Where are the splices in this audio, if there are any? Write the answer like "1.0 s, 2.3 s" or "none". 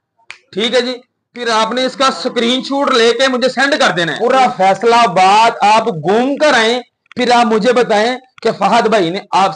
4.1 s